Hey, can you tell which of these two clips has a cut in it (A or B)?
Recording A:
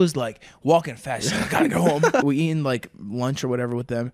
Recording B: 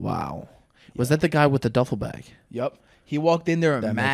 A